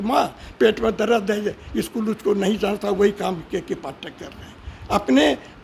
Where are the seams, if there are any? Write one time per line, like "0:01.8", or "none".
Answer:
none